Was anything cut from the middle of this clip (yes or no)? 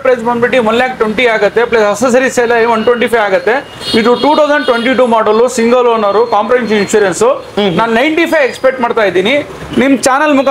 no